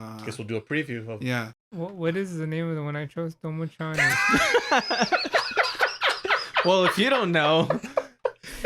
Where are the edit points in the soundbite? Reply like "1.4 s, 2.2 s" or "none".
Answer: 1.6 s